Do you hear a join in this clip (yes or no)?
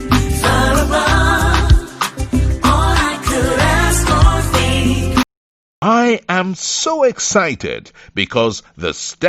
yes